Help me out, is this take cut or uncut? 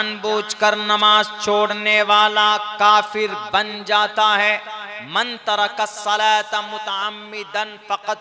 uncut